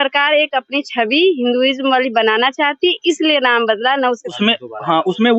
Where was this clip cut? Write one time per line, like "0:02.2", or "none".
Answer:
0:04.2